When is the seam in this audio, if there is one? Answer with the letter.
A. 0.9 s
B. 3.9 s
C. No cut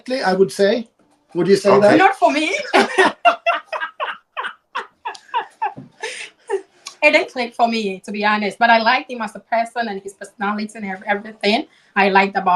C